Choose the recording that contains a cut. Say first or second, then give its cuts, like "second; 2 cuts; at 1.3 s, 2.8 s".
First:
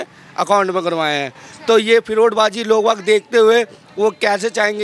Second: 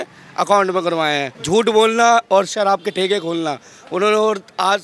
second; 1 cut; at 1.3 s